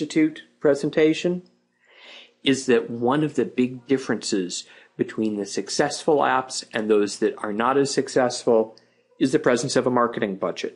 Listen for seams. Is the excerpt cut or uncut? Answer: uncut